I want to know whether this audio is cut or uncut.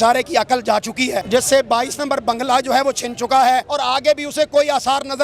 cut